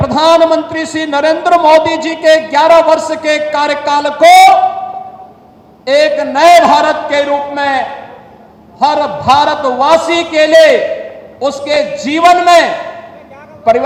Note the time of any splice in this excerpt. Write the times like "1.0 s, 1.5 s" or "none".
none